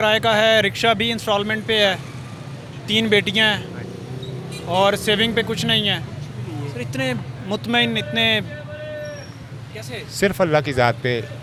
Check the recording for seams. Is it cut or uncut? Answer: uncut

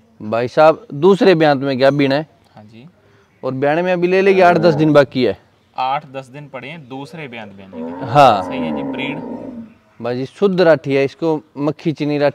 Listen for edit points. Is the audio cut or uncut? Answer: uncut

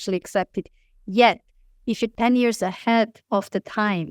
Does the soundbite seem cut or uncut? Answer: cut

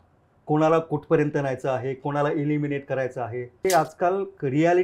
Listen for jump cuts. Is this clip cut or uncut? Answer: cut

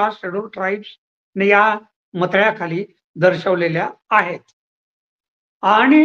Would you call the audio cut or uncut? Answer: uncut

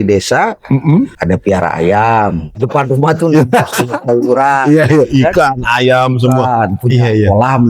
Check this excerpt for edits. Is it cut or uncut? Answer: cut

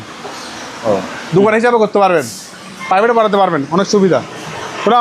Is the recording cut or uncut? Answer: cut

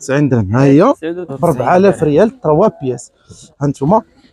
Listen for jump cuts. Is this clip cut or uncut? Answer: cut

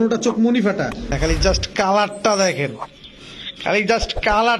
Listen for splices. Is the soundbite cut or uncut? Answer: cut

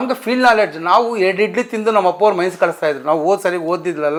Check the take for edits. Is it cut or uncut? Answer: uncut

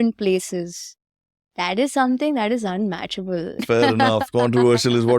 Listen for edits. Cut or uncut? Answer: cut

